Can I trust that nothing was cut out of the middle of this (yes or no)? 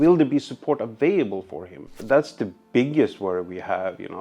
no